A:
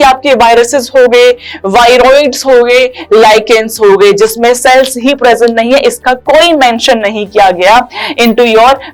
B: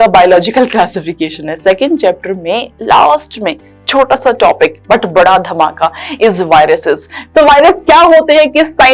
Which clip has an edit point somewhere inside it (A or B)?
B